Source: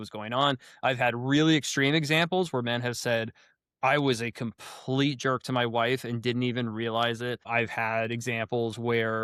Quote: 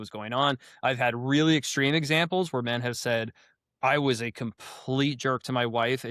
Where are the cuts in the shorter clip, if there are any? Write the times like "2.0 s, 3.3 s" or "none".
none